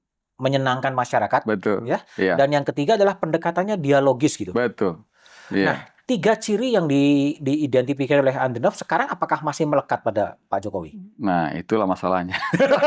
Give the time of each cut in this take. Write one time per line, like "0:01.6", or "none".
none